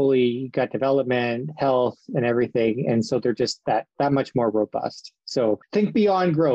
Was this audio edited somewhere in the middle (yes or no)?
yes